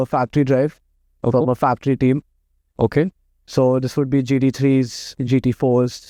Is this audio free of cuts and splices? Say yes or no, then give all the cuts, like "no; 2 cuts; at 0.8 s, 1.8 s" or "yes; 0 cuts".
yes; 0 cuts